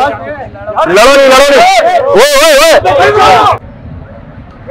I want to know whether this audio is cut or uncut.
cut